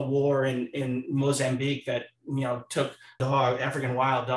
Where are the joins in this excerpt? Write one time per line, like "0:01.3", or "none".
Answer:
0:03.2